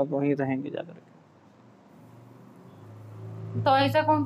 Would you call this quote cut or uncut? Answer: cut